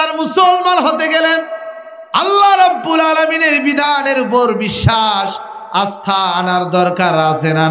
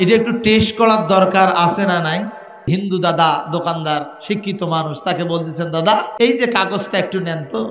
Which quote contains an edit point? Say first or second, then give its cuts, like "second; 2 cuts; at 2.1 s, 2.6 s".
second; 2 cuts; at 2.7 s, 6.1 s